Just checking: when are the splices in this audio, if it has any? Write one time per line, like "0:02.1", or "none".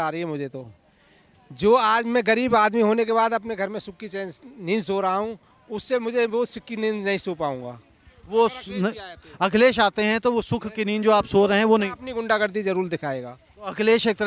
none